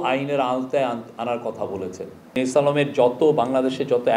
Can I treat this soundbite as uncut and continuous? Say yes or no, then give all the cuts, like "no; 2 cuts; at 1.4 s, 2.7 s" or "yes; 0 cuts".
no; 1 cut; at 2.4 s